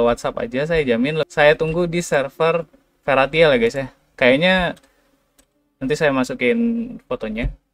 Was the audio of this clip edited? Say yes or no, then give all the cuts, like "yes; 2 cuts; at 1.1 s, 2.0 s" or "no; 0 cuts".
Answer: yes; 1 cut; at 1.3 s